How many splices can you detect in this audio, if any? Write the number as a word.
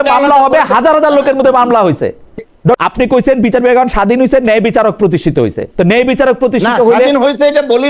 one